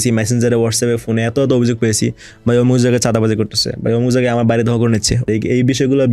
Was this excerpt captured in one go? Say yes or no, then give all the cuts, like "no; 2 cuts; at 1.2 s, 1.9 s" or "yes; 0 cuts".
no; 1 cut; at 5.2 s